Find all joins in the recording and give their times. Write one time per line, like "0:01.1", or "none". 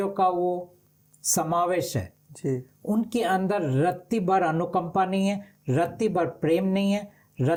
none